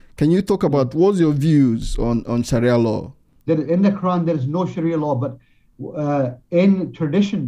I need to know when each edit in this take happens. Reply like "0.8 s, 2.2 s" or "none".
3.3 s